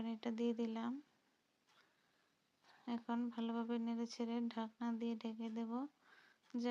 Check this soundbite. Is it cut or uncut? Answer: uncut